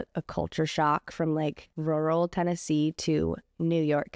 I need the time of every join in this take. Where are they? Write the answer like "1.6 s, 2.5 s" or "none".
1.7 s